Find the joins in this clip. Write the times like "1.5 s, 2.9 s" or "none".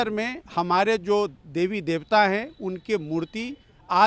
none